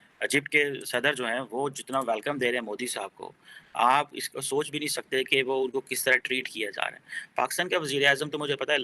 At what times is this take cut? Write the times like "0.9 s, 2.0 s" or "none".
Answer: none